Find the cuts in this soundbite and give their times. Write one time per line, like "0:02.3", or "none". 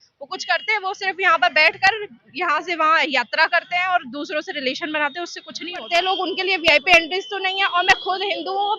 0:05.9